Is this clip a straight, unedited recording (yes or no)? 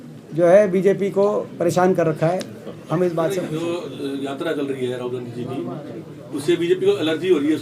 no